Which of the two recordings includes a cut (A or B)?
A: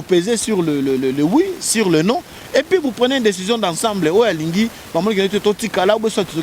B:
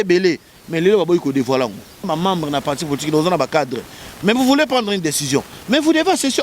B